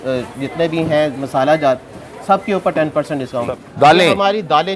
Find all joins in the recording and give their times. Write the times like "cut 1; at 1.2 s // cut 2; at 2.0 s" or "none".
cut 1; at 3.4 s